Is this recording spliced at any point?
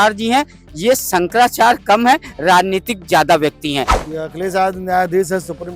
yes; 1 cut; at 4.0 s

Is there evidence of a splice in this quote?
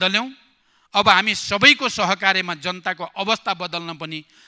no; 0 cuts

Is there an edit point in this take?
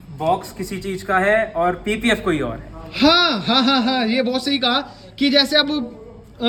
no; 0 cuts

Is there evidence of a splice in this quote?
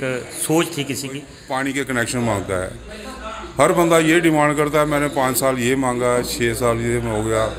yes; 1 cut; at 1.3 s

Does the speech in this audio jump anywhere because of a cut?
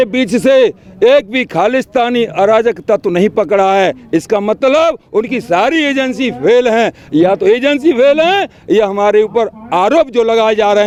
no; 0 cuts

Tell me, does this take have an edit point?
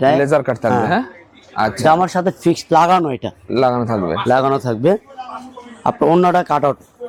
no; 0 cuts

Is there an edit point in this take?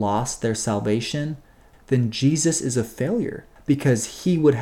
yes; 1 cut; at 1.7 s

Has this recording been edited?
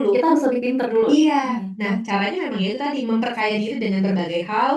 no; 0 cuts

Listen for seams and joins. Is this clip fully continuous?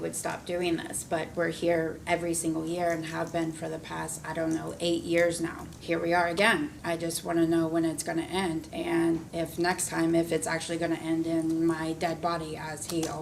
no; 4 cuts; at 5.7 s, 6.8 s, 8.7 s, 9.3 s

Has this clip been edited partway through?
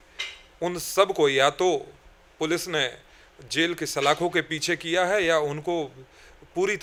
no; 0 cuts

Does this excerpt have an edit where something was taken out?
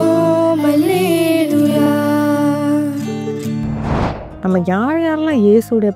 yes; 1 cut; at 4.4 s

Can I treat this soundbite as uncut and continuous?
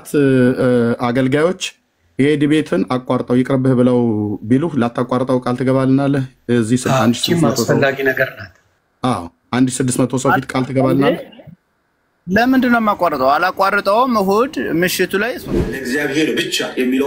no; 1 cut; at 15.5 s

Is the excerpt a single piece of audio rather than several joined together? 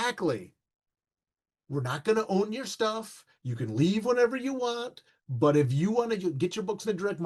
yes; 0 cuts

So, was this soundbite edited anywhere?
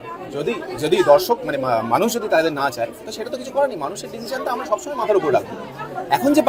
no; 0 cuts

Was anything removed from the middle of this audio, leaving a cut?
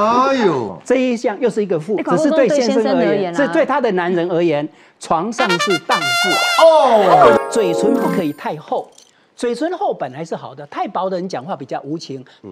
yes; 1 cut; at 7.4 s

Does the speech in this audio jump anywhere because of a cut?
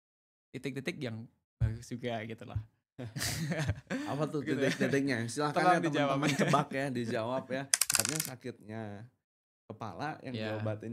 yes; 1 cut; at 8.0 s

